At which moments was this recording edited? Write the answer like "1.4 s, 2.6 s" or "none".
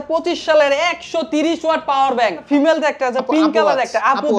2.4 s